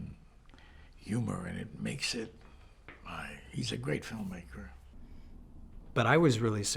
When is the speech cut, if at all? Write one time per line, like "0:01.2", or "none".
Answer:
0:04.9